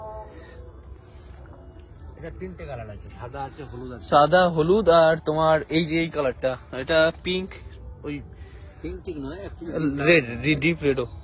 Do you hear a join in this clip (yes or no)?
no